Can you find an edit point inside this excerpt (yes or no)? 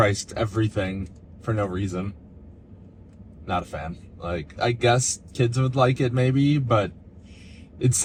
no